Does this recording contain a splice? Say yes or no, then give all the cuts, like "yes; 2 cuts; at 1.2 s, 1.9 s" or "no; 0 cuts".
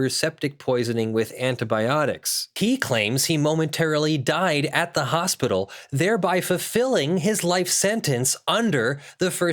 yes; 1 cut; at 2.5 s